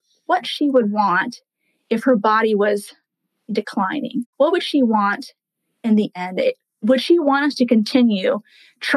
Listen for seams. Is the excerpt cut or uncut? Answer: cut